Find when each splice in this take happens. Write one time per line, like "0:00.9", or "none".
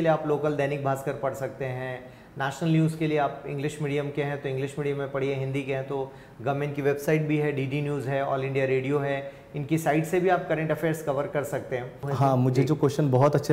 0:12.0

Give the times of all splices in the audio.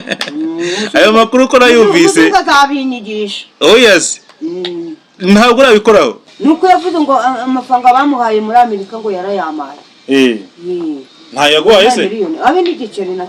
0:06.3

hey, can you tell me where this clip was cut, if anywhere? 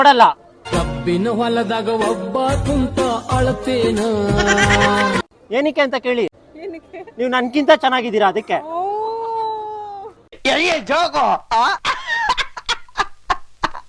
none

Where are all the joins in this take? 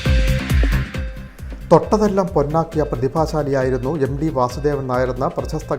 none

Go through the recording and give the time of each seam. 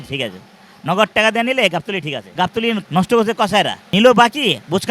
0:02.7
0:03.8

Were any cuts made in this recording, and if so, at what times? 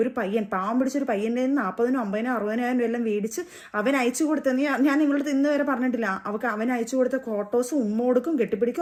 none

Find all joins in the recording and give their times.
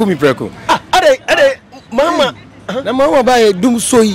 none

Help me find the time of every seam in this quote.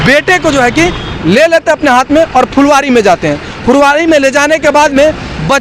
none

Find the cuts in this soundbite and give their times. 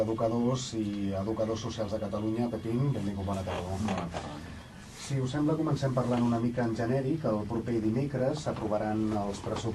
0:04.4

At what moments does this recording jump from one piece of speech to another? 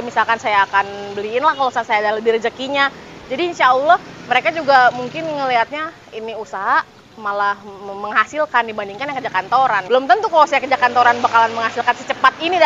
0:09.8

